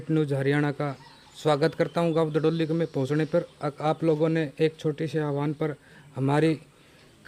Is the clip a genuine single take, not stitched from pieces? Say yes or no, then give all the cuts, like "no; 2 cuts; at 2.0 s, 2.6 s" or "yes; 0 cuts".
yes; 0 cuts